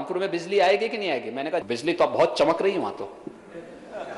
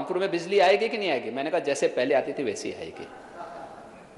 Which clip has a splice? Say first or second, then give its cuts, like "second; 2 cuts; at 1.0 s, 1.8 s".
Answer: first; 1 cut; at 1.6 s